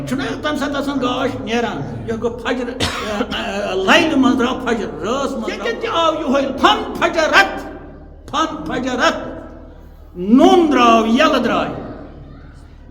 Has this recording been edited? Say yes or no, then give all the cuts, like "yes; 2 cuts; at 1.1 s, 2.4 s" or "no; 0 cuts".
yes; 1 cut; at 5.7 s